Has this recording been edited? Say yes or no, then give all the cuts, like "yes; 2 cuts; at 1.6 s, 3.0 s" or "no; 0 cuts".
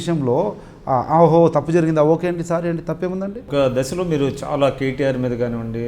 yes; 1 cut; at 3.5 s